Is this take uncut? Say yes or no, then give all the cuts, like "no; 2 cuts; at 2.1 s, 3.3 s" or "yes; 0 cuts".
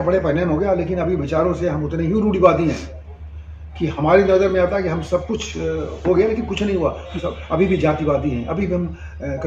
yes; 0 cuts